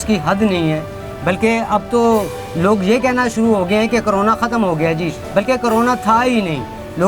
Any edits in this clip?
no; 0 cuts

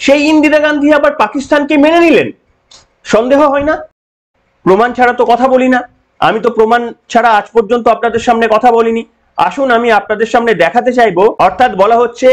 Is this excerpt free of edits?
no; 2 cuts; at 4.1 s, 11.3 s

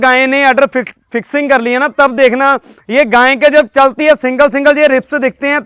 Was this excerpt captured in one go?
yes; 0 cuts

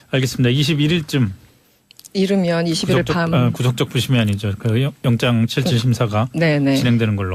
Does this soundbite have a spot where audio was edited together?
no; 0 cuts

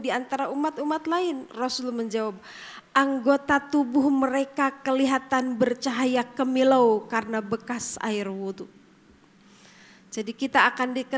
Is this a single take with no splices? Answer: yes; 0 cuts

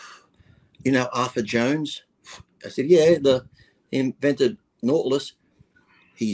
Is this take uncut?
yes; 0 cuts

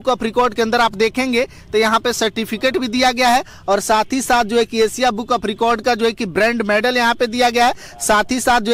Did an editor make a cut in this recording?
no; 0 cuts

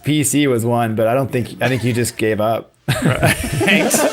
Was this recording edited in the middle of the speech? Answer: no; 0 cuts

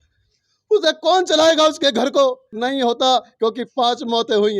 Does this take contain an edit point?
yes; 1 cut; at 2.5 s

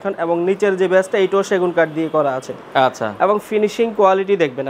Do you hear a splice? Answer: no; 0 cuts

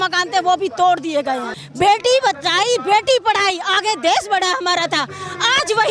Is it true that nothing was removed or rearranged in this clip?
no; 1 cut; at 1.6 s

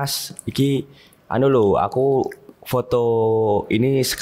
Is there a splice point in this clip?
no; 0 cuts

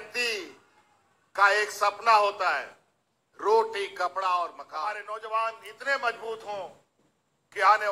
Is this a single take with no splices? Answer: no; 1 cut; at 4.6 s

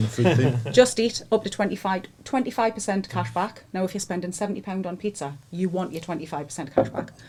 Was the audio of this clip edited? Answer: no; 0 cuts

